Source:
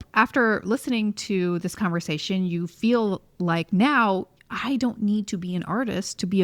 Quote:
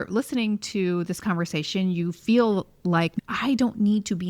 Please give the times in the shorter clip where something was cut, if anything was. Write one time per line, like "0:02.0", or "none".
0:03.1